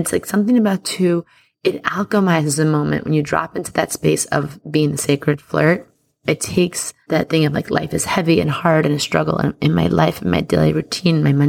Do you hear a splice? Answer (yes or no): yes